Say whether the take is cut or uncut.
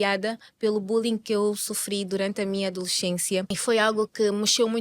cut